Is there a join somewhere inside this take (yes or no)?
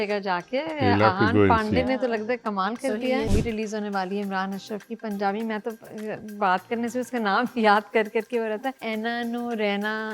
yes